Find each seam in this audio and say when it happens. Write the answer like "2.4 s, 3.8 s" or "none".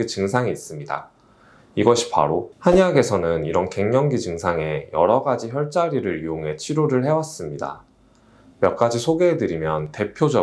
2.5 s